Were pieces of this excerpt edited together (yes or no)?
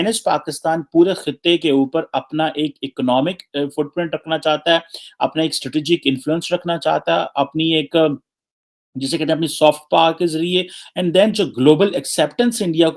no